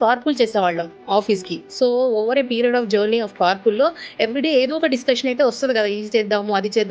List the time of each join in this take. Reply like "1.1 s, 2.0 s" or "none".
none

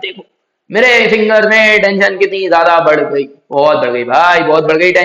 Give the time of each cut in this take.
none

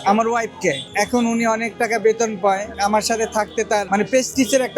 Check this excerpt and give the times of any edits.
2.7 s, 3.9 s

